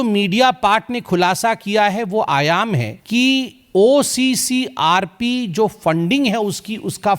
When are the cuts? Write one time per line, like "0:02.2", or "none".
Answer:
0:02.9